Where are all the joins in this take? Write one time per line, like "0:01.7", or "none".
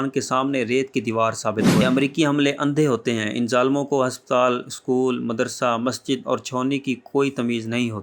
0:01.8

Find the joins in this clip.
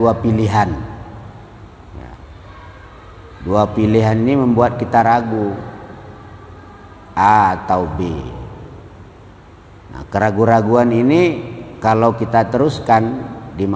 none

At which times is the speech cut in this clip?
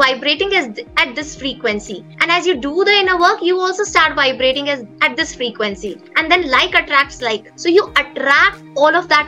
none

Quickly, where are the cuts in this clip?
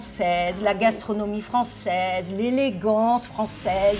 none

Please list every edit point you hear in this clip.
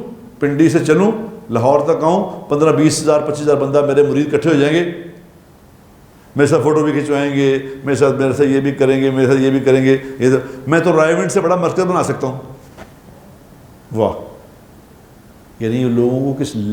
none

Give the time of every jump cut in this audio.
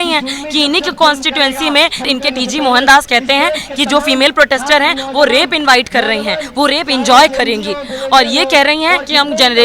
0:02.1

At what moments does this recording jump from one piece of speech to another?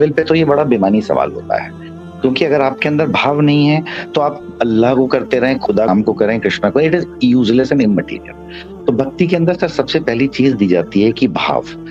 none

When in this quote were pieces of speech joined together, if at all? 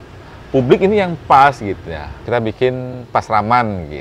0:02.2

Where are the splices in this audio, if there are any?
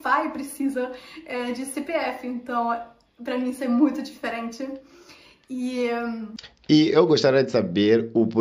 0:06.3

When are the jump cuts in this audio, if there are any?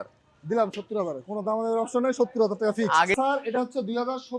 0:03.1

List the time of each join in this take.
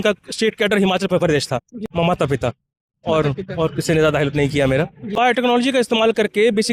0:01.7
0:05.1

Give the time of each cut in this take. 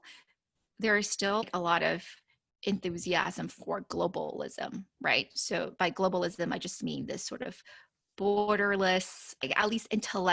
0:01.5

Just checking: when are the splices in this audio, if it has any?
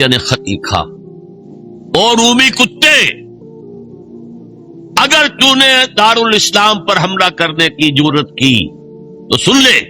0:03.3
0:04.9

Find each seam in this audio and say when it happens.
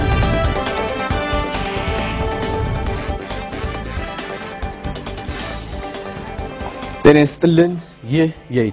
none

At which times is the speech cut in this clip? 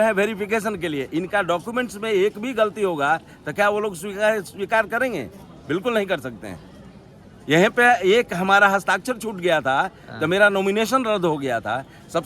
none

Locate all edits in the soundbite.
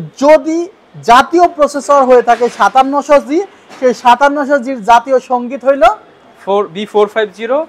none

